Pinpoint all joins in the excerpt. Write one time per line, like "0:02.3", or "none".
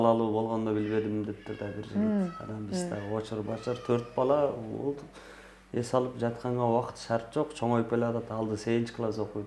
none